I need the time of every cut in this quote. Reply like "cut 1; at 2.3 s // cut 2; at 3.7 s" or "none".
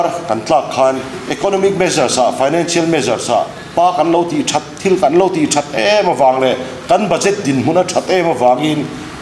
cut 1; at 1.2 s // cut 2; at 3.6 s